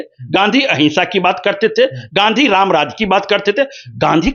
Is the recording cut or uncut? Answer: uncut